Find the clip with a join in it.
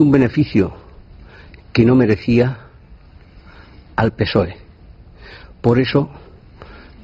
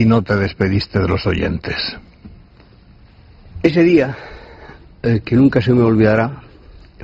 second; 1 cut; at 0.9 s

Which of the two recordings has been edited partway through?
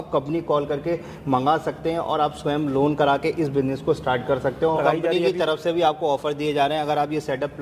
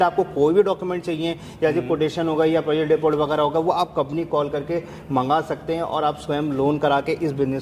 first; 1 cut; at 4.8 s

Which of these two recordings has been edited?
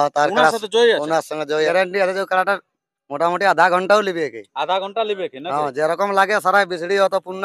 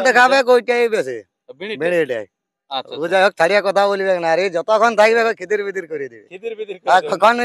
first; 1 cut; at 1.7 s

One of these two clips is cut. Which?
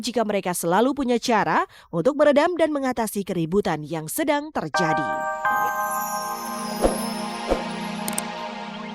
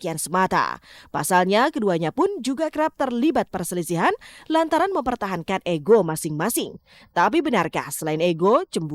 first; 1 cut; at 4.7 s

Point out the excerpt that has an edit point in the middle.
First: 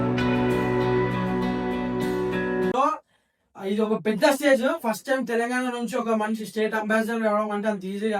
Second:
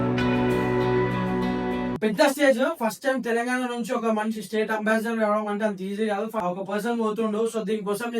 second; 2 cuts; at 2.0 s, 6.4 s

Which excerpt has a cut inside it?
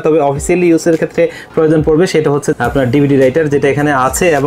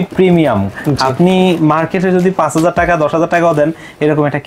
first; 1 cut; at 2.5 s

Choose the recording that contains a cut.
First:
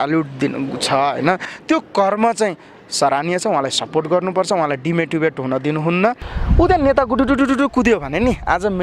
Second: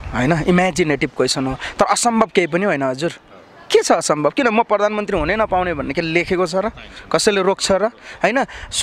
first; 2 cuts; at 1.5 s, 6.2 s

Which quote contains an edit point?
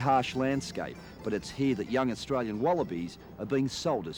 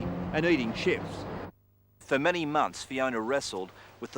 second; 1 cut; at 1.6 s

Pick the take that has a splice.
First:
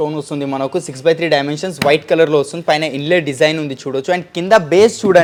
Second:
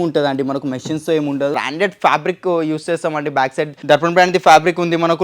second; 2 cuts; at 1.5 s, 3.8 s

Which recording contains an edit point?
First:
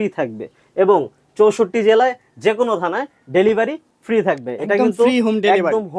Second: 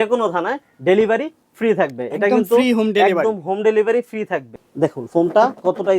second; 1 cut; at 4.4 s

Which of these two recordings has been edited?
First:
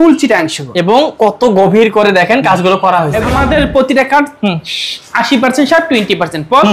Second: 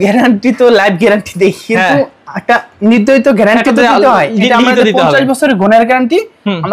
first; 1 cut; at 3.2 s

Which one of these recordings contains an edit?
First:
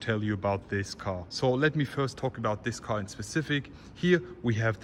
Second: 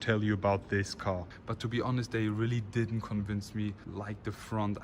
second; 2 cuts; at 1.3 s, 3.8 s

